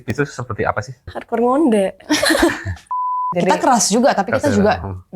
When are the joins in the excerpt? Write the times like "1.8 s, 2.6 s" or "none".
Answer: 1.1 s, 3.2 s